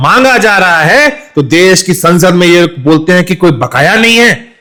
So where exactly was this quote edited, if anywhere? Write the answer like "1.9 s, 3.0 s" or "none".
none